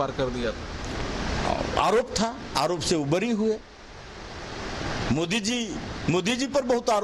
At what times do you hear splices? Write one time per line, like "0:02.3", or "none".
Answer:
none